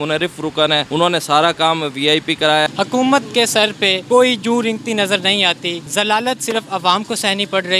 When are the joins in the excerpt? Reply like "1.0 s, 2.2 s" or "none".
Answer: 0.9 s, 2.7 s, 4.0 s, 5.8 s